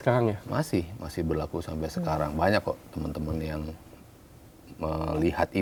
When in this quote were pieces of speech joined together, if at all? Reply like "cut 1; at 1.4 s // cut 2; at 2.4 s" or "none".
none